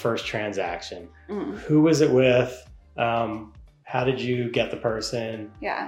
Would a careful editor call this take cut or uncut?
uncut